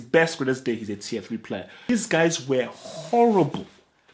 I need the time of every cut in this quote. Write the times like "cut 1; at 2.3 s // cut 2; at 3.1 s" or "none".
cut 1; at 1.8 s